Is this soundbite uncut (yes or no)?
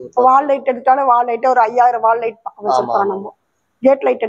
yes